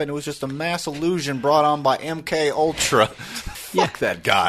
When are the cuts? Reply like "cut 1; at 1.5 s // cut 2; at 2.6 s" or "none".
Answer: cut 1; at 3.6 s